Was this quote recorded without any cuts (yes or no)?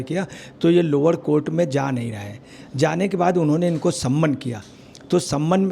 yes